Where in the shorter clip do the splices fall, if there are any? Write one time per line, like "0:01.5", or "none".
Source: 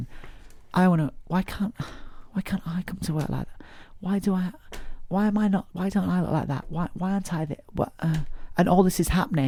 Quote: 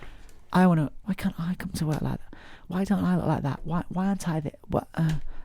0:01.0
0:02.6